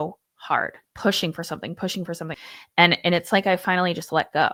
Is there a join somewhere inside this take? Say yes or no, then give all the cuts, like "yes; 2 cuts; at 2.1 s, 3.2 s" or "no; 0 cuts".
no; 0 cuts